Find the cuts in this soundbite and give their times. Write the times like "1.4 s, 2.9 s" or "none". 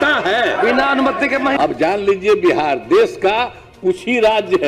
1.5 s